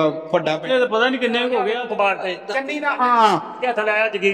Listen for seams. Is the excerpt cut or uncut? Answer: cut